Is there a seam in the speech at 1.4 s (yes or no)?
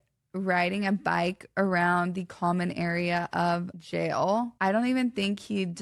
no